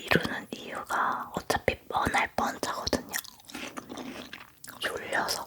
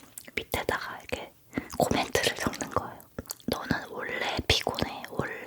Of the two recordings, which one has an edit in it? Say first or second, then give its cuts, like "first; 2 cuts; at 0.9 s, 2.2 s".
second; 1 cut; at 3.2 s